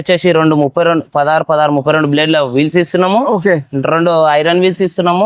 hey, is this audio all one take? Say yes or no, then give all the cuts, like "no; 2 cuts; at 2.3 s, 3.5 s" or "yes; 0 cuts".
yes; 0 cuts